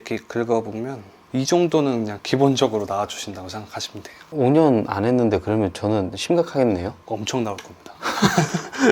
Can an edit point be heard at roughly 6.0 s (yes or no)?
no